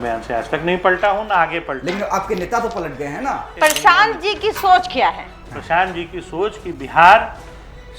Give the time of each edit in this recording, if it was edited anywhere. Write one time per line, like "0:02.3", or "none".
0:03.5